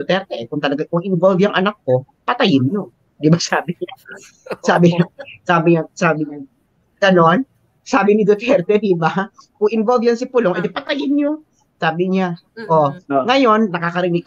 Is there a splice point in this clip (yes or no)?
no